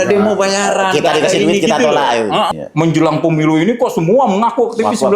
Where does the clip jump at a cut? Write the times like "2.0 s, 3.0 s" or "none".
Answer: 2.5 s